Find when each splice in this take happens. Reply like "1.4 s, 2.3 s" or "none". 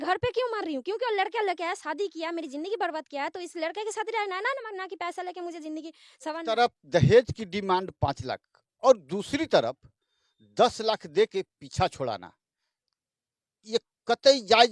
6.4 s